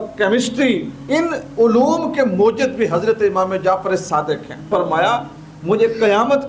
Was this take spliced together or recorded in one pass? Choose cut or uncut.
cut